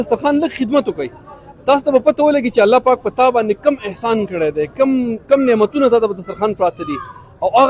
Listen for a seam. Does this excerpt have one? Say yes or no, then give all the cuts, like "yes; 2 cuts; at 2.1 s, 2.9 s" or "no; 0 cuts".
no; 0 cuts